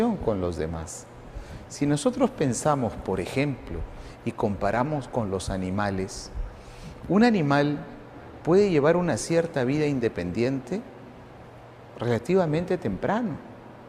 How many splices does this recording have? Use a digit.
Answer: 1